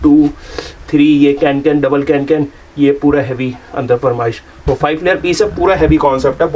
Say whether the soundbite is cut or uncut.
uncut